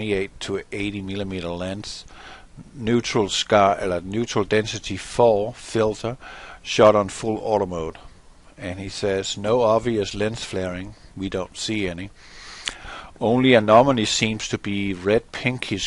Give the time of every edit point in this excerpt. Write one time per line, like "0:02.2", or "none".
0:13.8